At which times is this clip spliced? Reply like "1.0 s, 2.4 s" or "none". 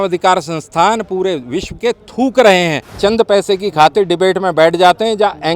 3.0 s

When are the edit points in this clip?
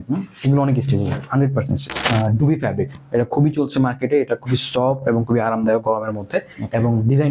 1.9 s, 6.5 s

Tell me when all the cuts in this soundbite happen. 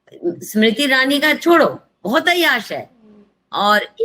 none

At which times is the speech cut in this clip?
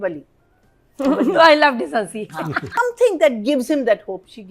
2.7 s

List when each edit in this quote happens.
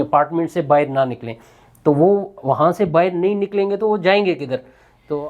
none

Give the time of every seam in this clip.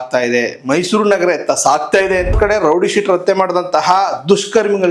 2.3 s

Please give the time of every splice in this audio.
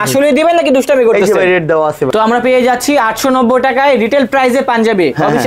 none

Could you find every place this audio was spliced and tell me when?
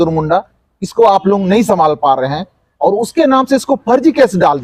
none

